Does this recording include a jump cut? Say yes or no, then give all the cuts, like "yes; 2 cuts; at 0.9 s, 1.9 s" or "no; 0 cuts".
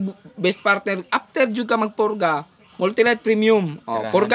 no; 0 cuts